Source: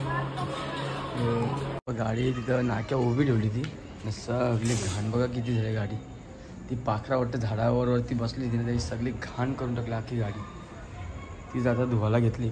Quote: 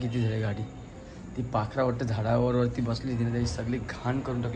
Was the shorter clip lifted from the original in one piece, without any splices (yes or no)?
yes